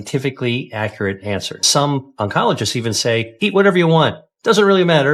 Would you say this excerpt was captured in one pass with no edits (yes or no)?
no